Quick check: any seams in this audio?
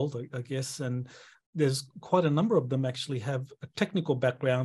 yes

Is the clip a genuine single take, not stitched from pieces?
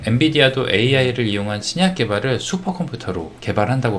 yes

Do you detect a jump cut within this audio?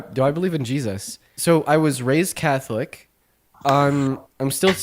yes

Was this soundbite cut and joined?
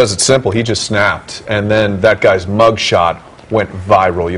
no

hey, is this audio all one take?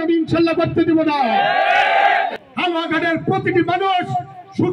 no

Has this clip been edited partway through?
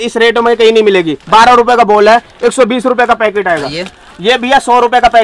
no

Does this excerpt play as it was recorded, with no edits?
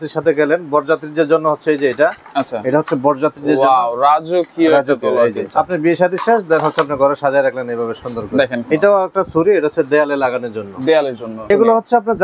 no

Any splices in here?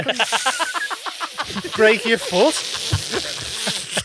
no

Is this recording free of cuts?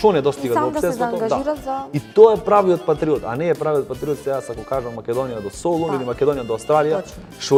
yes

